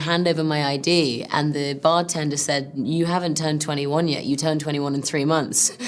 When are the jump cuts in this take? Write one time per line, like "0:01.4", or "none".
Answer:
none